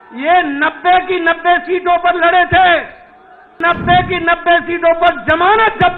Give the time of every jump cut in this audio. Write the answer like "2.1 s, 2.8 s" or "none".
3.6 s

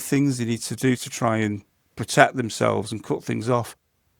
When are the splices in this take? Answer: none

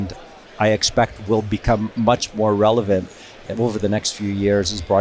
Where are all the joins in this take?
none

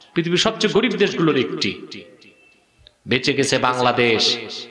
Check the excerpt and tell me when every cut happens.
none

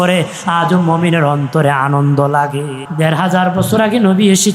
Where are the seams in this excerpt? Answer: 2.8 s

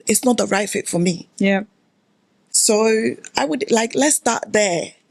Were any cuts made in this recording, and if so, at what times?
none

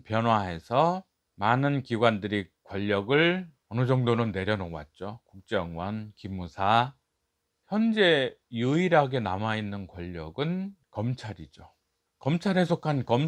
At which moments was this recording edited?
none

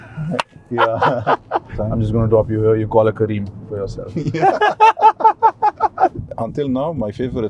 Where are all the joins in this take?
1.8 s, 6.1 s

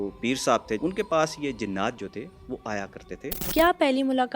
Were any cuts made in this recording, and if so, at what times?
0.8 s, 3.4 s

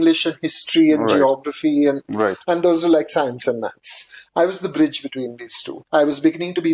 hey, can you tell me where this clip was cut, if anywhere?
5.7 s

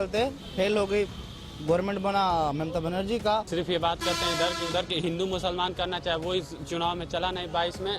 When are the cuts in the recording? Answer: 3.5 s

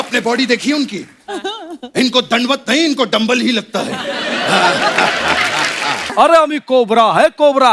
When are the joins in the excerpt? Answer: 6.0 s

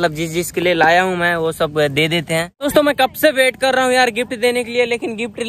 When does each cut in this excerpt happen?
2.6 s

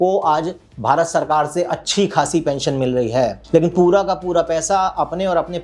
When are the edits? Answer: 3.4 s

